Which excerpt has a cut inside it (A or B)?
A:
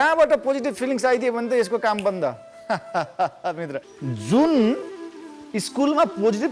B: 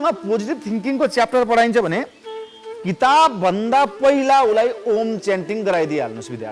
A